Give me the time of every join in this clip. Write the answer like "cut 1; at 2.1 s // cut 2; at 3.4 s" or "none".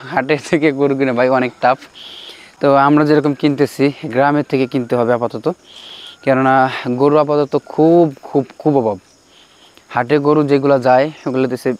none